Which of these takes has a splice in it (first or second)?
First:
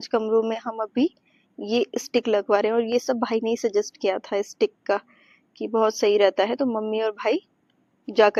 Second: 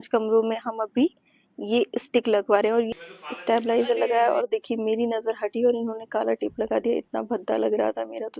second